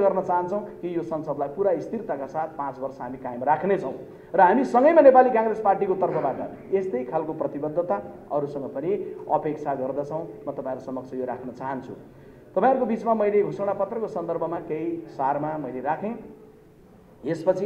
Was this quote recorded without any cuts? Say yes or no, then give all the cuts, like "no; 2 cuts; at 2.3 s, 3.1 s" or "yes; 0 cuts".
yes; 0 cuts